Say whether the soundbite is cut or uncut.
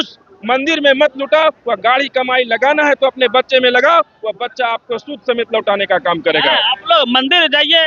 uncut